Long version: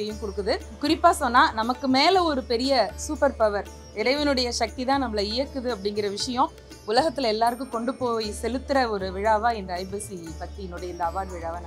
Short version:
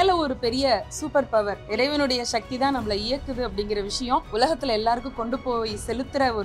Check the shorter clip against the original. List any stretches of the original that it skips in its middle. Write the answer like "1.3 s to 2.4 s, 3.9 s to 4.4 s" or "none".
3.7 s to 3.9 s, 6.5 s to 6.8 s